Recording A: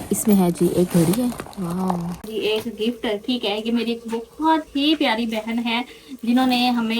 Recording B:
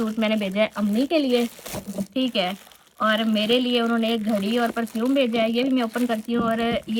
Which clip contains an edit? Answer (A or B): A